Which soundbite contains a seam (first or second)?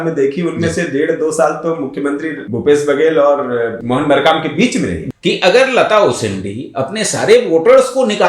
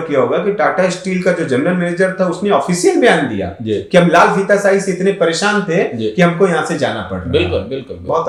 first